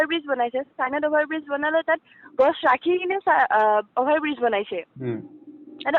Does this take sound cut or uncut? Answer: uncut